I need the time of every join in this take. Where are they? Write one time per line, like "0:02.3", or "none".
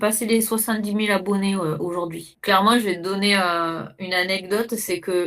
0:02.3